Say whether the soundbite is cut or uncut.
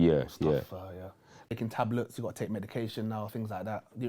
cut